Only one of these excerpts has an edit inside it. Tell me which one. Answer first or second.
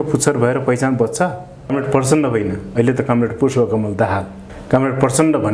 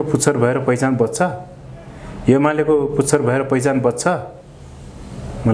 first